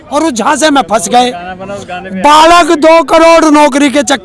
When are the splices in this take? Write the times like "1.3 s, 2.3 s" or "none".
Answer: none